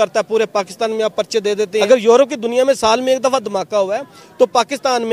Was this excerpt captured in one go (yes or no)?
no